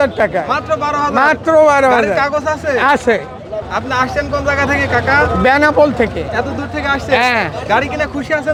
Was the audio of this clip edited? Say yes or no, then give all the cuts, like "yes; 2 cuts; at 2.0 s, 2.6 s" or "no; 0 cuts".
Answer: no; 0 cuts